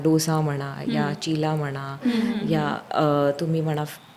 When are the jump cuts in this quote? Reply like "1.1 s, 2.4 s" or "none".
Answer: none